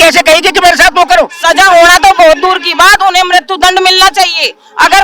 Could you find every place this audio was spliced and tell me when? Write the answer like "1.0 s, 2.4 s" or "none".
1.4 s